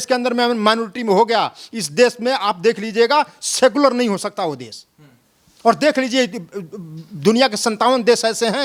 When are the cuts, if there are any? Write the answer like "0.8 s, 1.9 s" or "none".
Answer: none

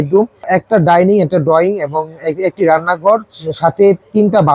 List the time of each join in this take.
none

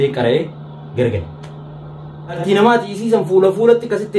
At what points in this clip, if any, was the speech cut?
2.4 s

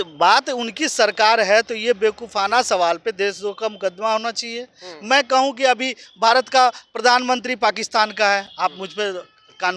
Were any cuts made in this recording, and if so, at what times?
none

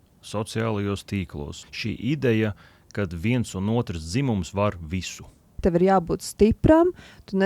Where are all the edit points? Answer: 1.6 s, 5.6 s

